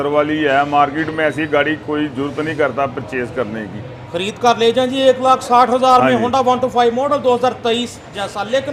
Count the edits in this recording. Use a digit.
0